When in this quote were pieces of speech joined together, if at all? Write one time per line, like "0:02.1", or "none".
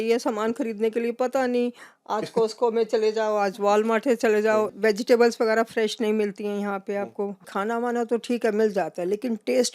0:04.7
0:07.5